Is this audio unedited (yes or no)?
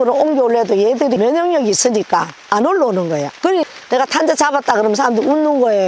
yes